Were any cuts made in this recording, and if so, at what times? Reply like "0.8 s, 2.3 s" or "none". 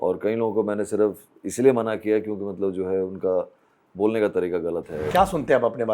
5.0 s